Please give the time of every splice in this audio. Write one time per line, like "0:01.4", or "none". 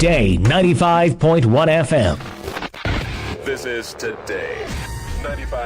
0:02.3